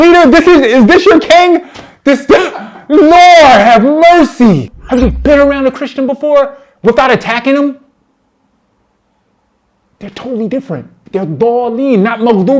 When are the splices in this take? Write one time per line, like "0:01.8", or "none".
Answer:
0:04.8
0:11.0